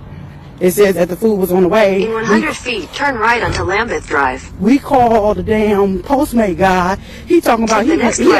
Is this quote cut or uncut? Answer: uncut